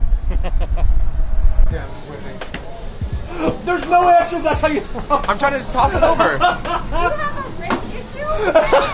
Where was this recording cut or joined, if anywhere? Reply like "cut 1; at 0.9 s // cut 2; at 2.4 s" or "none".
cut 1; at 1.7 s